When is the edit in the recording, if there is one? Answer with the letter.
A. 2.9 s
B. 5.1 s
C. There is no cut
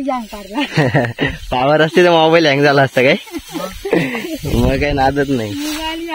C